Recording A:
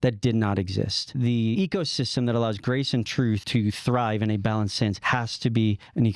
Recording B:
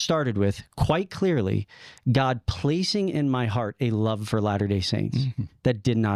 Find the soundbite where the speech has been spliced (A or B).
A